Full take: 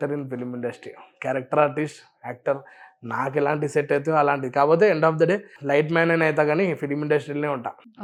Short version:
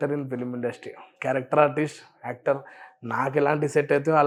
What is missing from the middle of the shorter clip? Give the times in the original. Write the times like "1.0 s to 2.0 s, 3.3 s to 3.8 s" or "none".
none